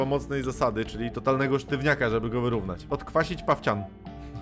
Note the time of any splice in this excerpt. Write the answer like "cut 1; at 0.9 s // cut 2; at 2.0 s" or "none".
cut 1; at 2.8 s